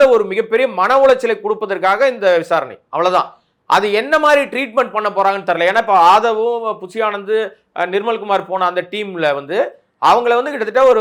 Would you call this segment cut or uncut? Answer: uncut